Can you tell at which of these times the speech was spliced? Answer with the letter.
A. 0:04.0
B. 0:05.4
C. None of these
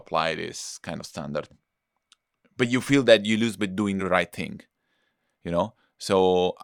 A